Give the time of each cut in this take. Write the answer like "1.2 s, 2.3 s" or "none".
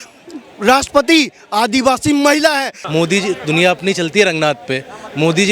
2.8 s